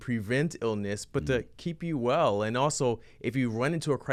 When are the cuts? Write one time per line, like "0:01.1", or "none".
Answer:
none